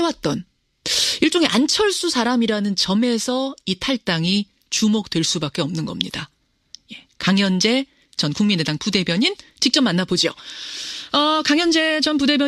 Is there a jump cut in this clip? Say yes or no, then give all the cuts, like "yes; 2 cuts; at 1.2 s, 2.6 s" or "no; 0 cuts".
no; 0 cuts